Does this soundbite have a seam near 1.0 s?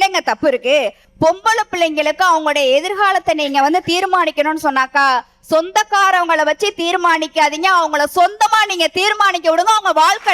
yes; 1 cut; at 1.0 s

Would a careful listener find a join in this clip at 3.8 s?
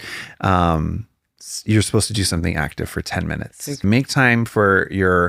yes; 1 cut; at 3.8 s

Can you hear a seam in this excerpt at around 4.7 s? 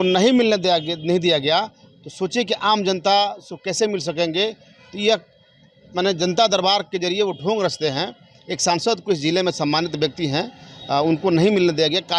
no; 0 cuts

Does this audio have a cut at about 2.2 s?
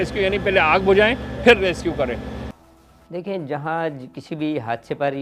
no; 0 cuts

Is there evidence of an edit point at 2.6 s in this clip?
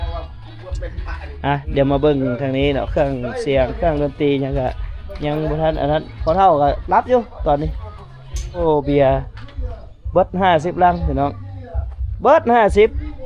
no; 1 cut; at 8.6 s

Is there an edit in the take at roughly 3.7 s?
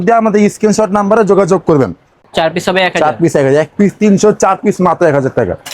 no; 1 cut; at 2.2 s

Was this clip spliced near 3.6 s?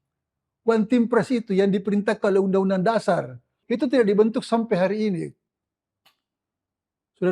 yes; 1 cut; at 3.6 s

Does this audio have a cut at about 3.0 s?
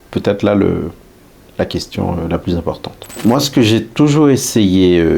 yes; 1 cut; at 3.0 s

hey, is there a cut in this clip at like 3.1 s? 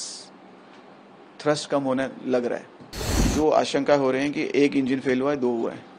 yes; 1 cut; at 3.1 s

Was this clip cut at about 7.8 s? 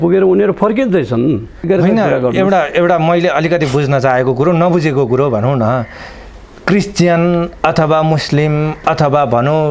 no; 1 cut; at 1.7 s

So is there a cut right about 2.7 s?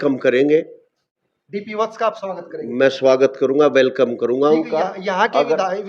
no; 1 cut; at 1.2 s

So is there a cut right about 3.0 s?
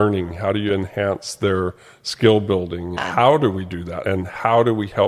yes; 2 cuts; at 3.0 s, 4.0 s

